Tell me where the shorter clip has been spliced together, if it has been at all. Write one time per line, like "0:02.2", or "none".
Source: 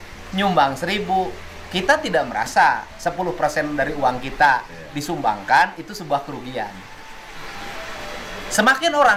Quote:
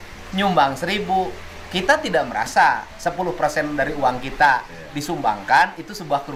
none